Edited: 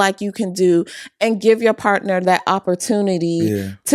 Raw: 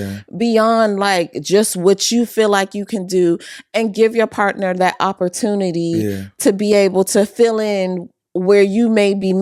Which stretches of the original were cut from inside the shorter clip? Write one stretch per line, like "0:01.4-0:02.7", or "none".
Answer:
none